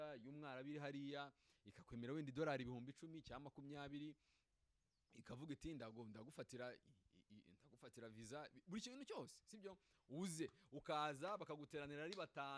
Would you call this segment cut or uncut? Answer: uncut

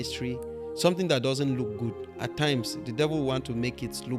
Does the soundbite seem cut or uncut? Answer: uncut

